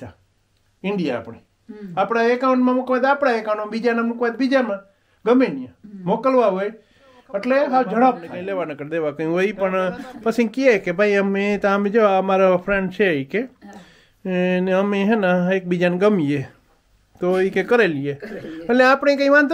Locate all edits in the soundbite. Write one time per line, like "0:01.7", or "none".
0:08.3